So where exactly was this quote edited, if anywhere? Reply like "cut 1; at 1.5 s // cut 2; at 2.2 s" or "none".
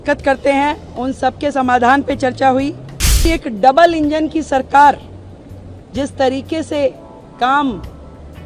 cut 1; at 3.3 s